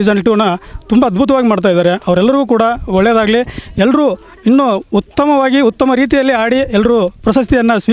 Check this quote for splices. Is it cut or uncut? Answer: uncut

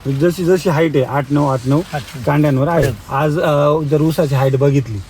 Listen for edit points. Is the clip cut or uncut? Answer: cut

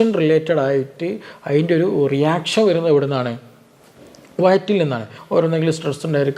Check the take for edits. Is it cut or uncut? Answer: cut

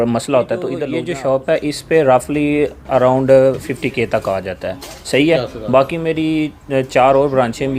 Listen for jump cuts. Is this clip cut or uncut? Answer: cut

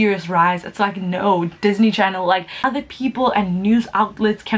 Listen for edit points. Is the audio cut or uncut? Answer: cut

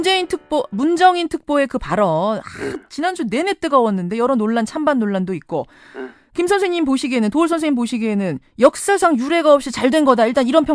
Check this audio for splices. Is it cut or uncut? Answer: uncut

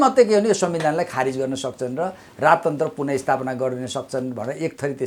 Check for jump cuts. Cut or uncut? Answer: uncut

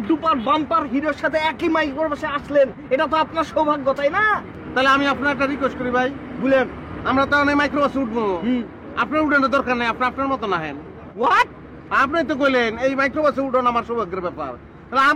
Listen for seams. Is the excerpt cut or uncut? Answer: cut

